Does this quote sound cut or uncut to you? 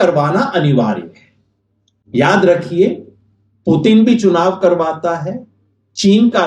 uncut